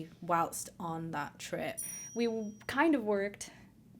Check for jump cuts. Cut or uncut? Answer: cut